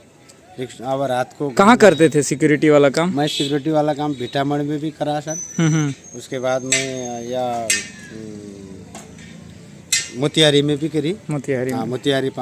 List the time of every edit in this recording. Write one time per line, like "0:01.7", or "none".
none